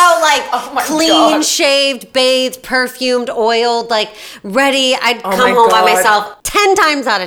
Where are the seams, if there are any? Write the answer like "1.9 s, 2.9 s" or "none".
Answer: 6.4 s